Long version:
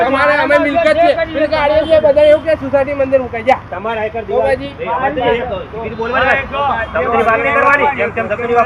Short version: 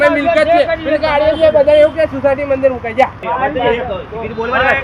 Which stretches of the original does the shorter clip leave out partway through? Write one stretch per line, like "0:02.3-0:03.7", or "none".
0:03.7-0:04.8